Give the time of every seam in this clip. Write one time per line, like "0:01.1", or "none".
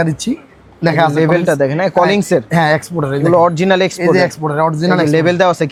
none

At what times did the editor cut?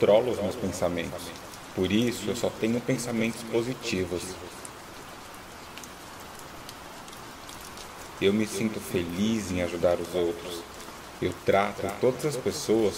none

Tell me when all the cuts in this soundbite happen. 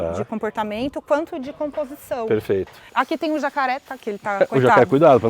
0:02.8

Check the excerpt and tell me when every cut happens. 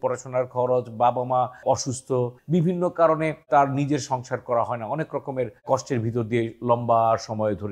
0:02.4

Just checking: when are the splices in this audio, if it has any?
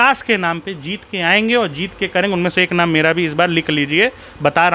none

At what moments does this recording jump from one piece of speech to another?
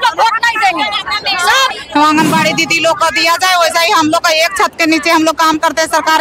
0:01.7

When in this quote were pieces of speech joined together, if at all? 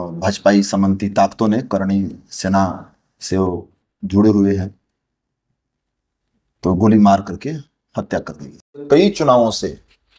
0:08.8

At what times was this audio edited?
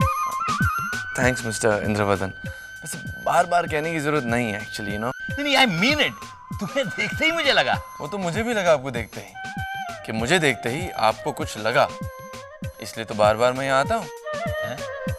none

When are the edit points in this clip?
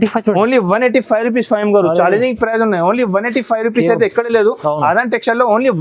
none

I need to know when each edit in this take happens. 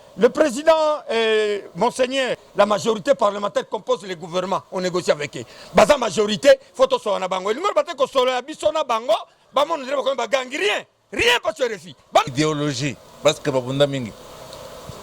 0:02.4
0:12.3

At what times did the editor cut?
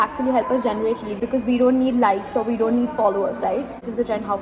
none

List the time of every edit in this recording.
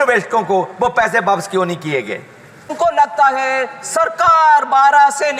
0:02.7

